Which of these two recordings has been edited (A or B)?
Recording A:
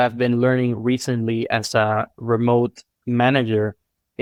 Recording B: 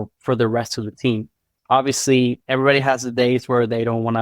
B